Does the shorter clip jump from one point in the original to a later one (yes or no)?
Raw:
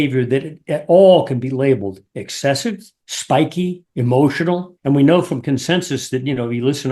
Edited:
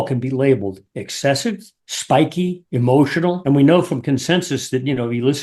yes